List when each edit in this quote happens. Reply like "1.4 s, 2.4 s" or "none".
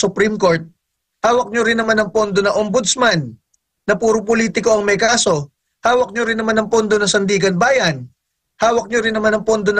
none